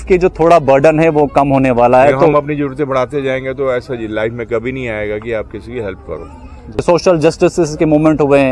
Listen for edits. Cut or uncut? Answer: cut